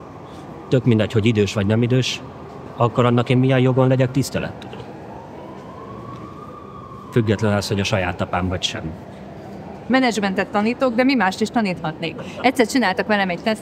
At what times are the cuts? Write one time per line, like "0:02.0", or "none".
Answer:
0:02.7
0:09.8